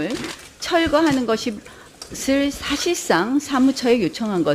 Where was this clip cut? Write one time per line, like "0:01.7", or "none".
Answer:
0:02.6